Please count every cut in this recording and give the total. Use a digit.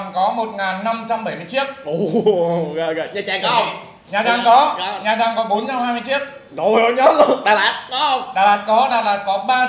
0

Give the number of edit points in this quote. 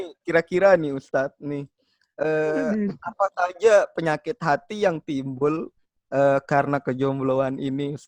0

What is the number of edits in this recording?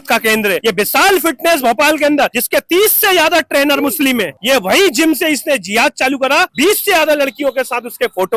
2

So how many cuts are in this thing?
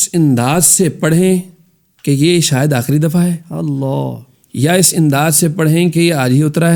0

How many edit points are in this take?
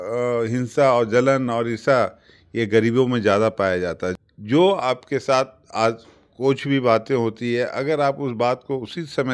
1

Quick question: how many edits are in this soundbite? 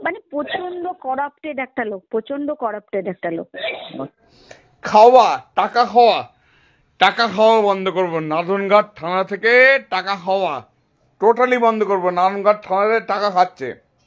1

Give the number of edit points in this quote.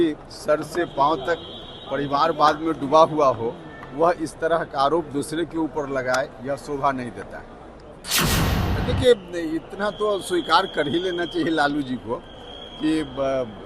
1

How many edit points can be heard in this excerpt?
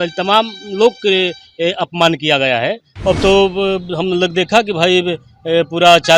1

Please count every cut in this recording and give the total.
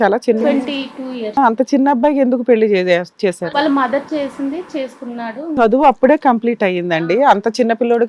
1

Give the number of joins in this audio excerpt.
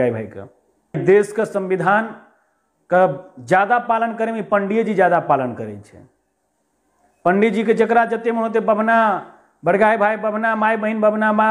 1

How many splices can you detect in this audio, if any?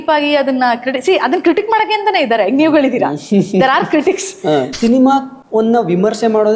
2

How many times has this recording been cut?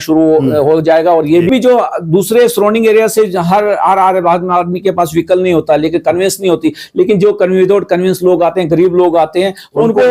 1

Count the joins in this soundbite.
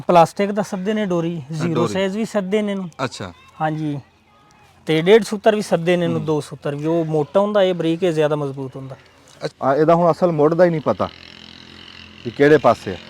1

